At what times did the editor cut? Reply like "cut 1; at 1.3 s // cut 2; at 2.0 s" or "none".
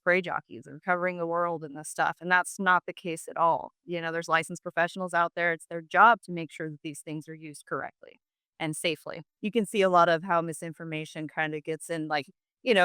cut 1; at 9.3 s